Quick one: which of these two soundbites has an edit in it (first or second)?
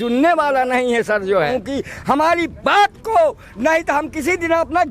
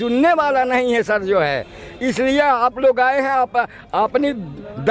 first